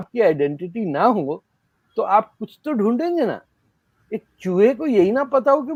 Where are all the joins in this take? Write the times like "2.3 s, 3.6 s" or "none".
none